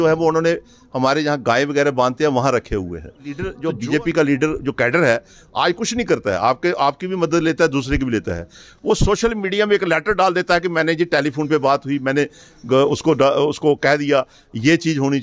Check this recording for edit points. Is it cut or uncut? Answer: cut